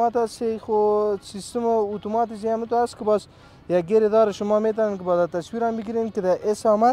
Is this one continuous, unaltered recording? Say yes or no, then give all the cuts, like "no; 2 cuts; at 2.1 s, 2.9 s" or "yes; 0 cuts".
yes; 0 cuts